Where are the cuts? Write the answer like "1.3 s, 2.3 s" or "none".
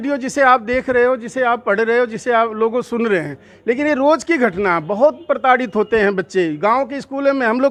none

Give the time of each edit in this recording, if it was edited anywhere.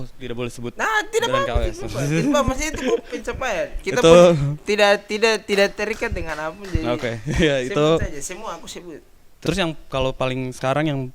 9.4 s

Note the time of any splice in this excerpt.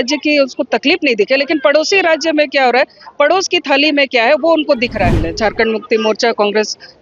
5.2 s

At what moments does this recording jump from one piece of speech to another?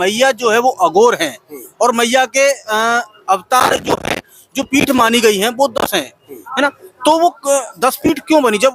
none

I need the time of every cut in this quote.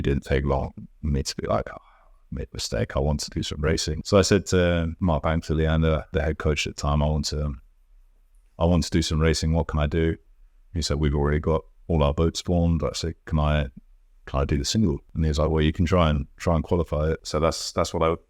3.9 s, 4.9 s, 6.1 s, 15.1 s, 17.2 s

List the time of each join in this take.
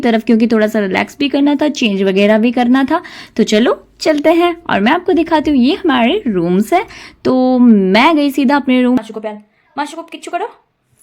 9.0 s

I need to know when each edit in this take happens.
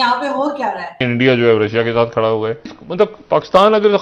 1.0 s, 2.8 s

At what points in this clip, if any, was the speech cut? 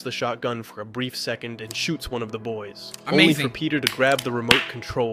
none

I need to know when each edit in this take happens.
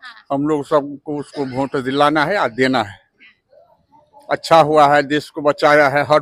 none

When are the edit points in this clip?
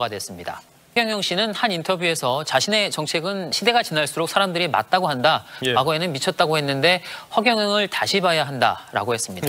0.9 s, 3.5 s

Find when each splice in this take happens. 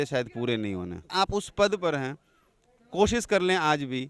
1.1 s

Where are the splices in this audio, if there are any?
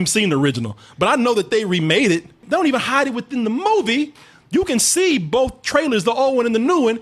2.4 s

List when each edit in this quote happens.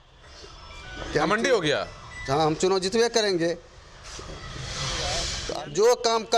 5.4 s

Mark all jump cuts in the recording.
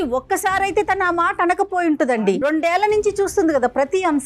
2.3 s

